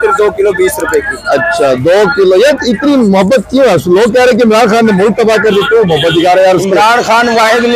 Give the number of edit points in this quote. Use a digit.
0